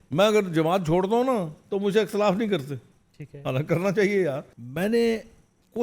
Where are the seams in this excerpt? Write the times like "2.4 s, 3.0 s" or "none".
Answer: 4.5 s